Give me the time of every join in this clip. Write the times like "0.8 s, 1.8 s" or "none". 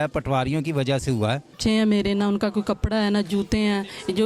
1.6 s

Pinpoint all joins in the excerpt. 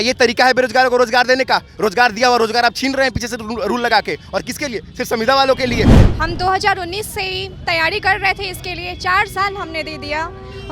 5.9 s

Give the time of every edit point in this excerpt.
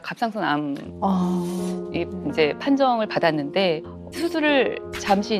4.0 s

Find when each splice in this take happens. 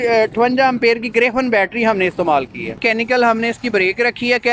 2.8 s

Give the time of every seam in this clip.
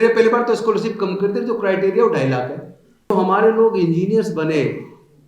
3.1 s

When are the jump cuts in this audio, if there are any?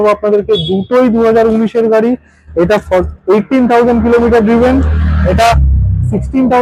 none

